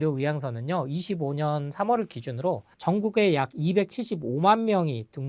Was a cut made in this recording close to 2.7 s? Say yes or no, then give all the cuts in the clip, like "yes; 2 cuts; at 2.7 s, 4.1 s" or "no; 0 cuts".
yes; 1 cut; at 2.7 s